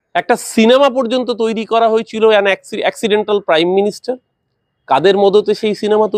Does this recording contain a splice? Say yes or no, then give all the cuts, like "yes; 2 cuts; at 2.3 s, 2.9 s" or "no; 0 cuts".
no; 0 cuts